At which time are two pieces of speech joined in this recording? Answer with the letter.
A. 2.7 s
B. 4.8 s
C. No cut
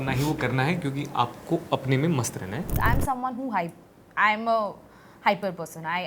A